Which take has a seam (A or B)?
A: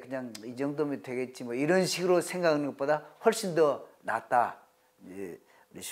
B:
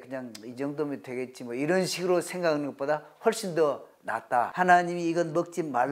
B